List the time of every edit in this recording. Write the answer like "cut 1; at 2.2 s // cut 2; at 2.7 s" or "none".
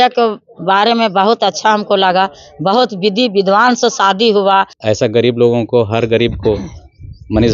cut 1; at 4.7 s